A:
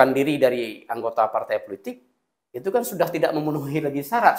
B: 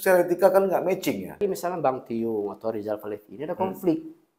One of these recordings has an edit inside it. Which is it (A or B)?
B